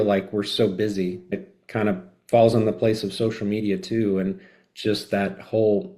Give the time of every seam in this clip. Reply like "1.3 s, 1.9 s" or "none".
1.3 s